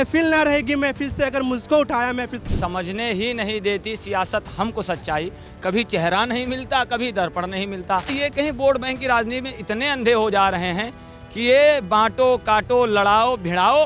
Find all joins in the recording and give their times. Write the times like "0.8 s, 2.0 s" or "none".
2.5 s, 8.1 s